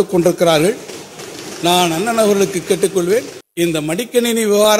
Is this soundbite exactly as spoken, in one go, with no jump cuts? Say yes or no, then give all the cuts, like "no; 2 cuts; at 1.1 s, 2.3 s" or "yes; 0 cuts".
no; 1 cut; at 3.4 s